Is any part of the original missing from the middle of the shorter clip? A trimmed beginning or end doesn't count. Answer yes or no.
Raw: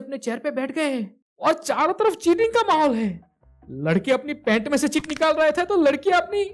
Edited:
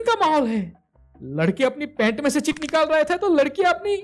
no